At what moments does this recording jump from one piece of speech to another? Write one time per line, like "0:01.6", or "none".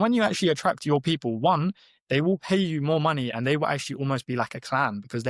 none